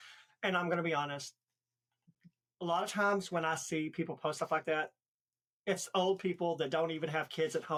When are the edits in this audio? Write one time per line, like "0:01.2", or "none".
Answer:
none